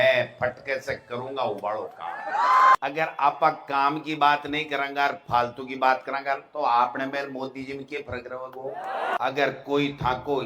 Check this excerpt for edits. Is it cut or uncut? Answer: cut